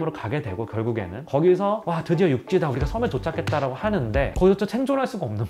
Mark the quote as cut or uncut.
uncut